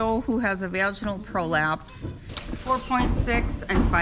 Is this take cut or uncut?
cut